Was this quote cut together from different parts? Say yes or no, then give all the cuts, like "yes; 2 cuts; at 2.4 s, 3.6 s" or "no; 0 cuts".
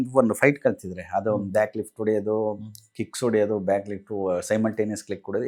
no; 0 cuts